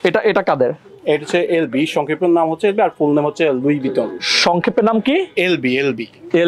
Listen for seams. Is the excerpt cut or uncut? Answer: uncut